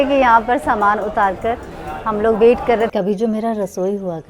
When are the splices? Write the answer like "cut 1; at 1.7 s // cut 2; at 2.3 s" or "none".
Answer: cut 1; at 2.9 s